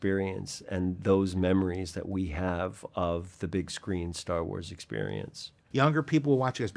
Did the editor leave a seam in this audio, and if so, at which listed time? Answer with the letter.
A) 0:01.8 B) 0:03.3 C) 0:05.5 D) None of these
C